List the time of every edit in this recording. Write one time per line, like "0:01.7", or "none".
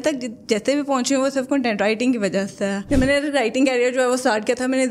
0:02.8